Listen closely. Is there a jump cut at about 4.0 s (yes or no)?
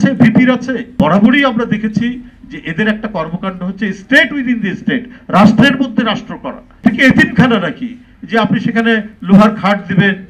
no